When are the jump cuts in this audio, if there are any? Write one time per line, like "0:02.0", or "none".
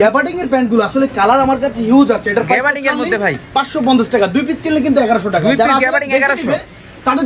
none